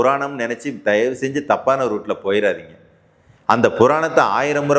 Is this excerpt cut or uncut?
uncut